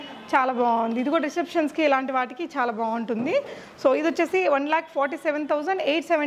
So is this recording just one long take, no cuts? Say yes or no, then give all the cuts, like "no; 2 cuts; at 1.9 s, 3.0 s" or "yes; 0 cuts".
yes; 0 cuts